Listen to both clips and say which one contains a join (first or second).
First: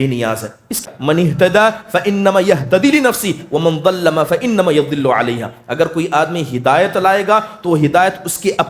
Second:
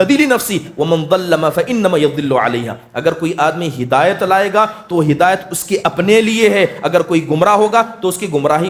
first